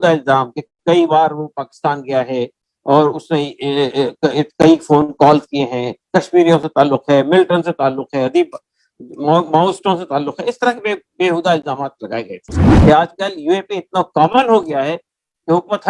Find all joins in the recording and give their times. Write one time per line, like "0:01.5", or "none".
0:12.6

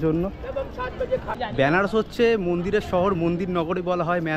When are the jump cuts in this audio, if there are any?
0:01.2

